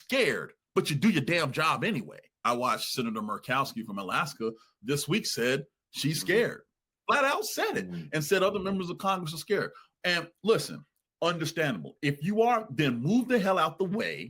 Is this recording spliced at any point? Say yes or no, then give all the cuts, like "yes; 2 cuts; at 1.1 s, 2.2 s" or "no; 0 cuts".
yes; 1 cut; at 2.4 s